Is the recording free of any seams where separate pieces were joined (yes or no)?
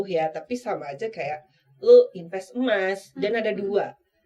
yes